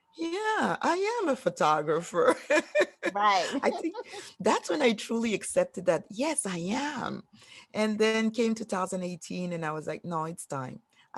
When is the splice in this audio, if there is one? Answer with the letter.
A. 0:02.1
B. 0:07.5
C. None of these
C